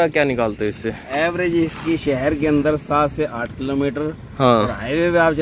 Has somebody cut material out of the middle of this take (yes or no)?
no